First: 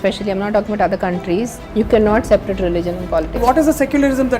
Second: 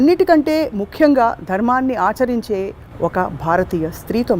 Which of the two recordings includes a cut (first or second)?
first